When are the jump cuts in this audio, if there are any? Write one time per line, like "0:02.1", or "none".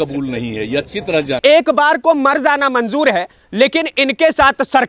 0:01.4